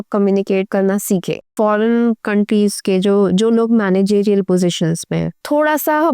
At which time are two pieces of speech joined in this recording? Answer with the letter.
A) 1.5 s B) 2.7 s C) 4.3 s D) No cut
A